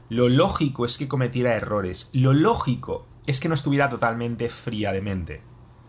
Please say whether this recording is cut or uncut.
uncut